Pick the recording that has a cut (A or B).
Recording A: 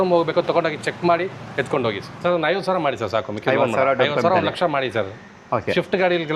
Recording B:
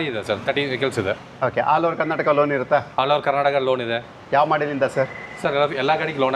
A